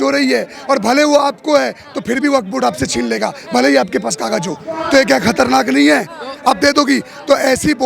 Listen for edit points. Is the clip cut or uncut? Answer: uncut